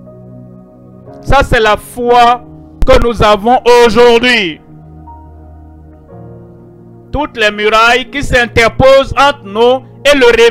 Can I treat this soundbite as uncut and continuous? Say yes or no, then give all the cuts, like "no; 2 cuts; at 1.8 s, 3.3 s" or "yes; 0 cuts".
no; 1 cut; at 1.2 s